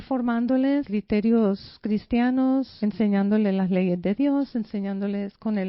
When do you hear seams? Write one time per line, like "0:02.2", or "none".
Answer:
0:00.9
0:02.7

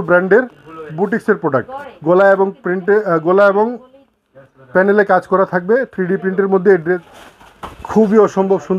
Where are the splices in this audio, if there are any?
0:07.0

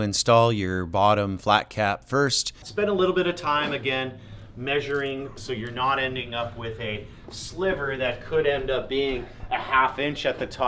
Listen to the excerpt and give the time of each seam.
0:02.6
0:05.3

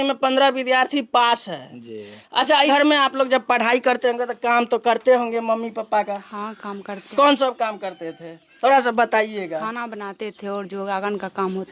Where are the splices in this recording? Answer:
0:02.7

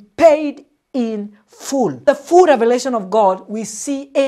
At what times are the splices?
0:02.0

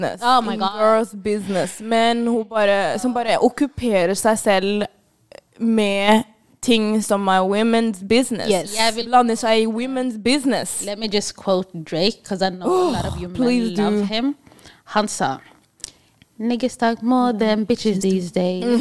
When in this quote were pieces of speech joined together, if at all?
none

